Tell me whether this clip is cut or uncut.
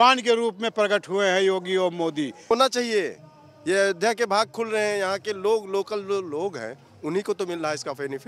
cut